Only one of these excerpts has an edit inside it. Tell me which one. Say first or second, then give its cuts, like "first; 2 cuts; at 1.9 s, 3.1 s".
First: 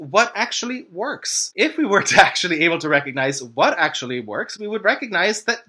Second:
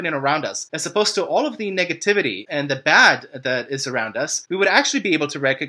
first; 1 cut; at 1.5 s